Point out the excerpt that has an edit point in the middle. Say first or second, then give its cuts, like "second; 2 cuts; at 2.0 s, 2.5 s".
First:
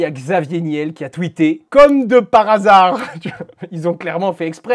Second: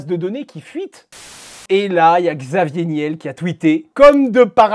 second; 1 cut; at 1.3 s